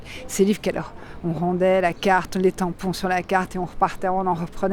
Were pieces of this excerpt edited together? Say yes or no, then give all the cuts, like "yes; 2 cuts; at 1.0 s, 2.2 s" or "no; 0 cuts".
no; 0 cuts